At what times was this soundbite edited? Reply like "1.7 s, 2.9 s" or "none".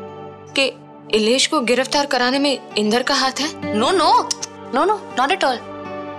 3.6 s